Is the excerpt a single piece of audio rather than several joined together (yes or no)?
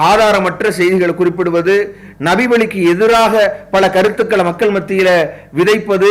yes